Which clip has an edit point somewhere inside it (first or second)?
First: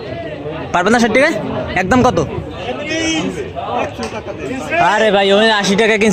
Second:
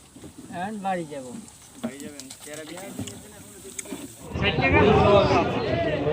second